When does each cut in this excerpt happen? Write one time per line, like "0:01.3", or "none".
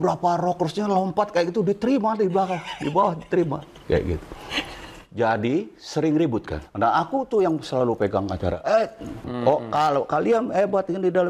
0:06.6
0:09.3